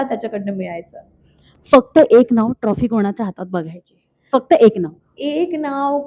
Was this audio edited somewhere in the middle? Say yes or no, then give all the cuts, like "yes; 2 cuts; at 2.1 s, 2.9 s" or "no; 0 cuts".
no; 0 cuts